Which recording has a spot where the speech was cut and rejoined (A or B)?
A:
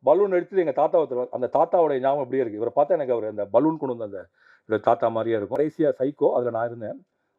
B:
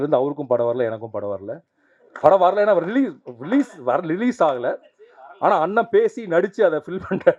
A